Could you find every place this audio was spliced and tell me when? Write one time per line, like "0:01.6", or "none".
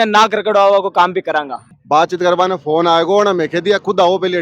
0:01.6